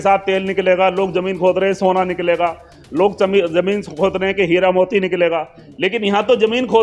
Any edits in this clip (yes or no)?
no